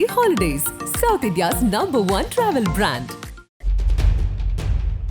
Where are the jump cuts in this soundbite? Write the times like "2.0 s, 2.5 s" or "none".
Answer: none